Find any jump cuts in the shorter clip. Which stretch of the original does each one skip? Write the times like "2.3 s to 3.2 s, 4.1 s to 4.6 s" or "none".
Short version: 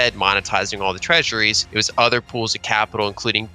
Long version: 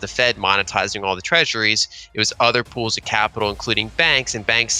1.8 s to 2.0 s